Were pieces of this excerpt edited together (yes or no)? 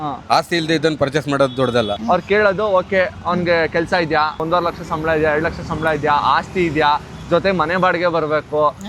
yes